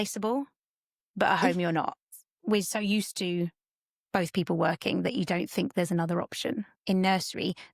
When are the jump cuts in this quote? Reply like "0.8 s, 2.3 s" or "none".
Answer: 2.1 s, 6.7 s

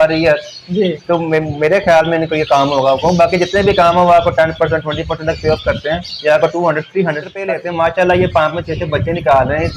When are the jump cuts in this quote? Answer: 7.5 s

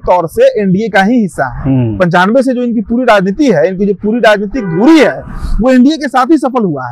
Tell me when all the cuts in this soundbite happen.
none

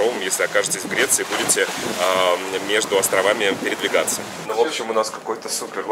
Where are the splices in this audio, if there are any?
4.4 s

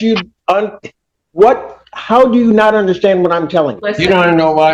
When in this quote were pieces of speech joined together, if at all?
3.8 s

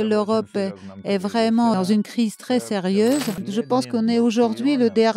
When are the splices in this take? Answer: 1.7 s, 3.4 s

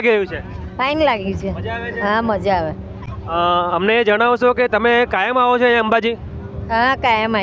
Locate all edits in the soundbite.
none

